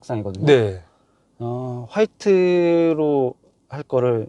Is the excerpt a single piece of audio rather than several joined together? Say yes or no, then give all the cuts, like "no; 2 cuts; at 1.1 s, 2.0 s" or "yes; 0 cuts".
yes; 0 cuts